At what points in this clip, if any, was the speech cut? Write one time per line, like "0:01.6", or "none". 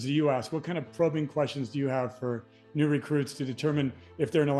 none